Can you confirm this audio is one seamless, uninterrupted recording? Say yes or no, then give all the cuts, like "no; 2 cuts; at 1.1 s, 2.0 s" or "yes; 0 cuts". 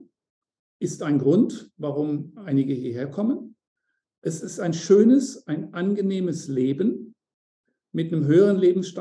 yes; 0 cuts